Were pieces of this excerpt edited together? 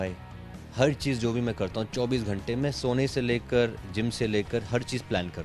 no; 0 cuts

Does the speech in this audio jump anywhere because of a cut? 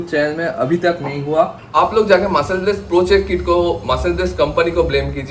yes; 1 cut; at 1.7 s

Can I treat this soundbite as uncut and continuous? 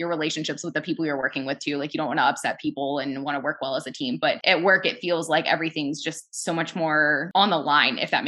no; 2 cuts; at 4.4 s, 7.2 s

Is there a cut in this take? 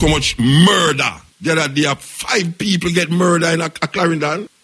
yes; 1 cut; at 1.2 s

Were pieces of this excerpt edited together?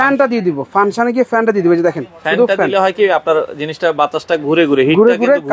no; 0 cuts

